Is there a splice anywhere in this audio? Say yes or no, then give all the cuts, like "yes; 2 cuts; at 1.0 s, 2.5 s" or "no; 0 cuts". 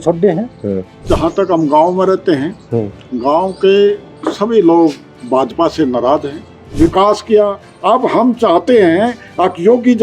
yes; 2 cuts; at 1.1 s, 6.7 s